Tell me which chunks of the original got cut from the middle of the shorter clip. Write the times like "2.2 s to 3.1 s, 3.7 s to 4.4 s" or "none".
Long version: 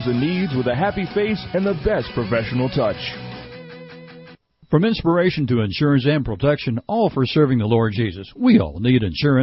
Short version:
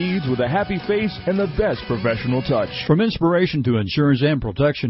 3.0 s to 4.6 s